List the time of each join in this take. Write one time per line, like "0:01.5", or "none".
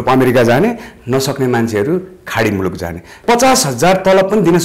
0:03.1

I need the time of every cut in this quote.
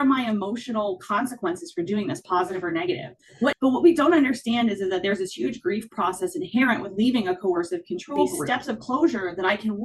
0:03.6
0:08.3

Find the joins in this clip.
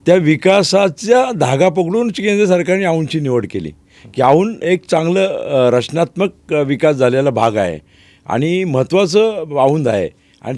none

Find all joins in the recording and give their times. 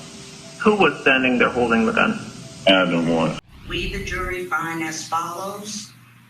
0:03.4

